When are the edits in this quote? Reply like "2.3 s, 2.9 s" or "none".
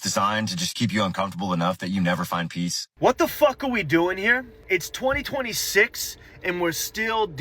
2.8 s, 4.5 s